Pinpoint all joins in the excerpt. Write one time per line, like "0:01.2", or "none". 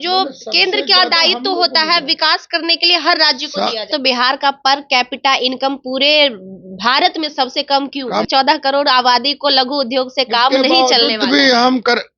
0:03.9
0:08.3